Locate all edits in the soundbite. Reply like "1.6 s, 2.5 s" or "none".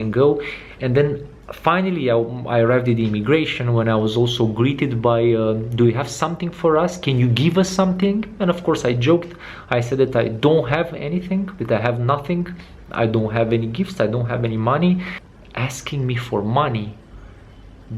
15.2 s